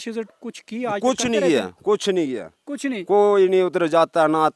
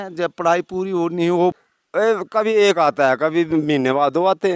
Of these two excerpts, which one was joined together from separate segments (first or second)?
second